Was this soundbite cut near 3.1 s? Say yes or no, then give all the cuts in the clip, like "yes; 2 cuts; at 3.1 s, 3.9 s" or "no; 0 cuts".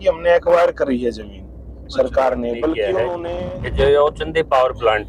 yes; 1 cut; at 3.1 s